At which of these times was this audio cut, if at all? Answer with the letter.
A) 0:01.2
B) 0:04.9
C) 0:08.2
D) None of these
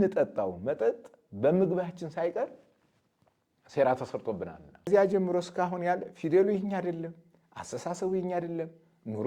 B